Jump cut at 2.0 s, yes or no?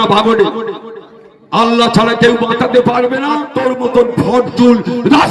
no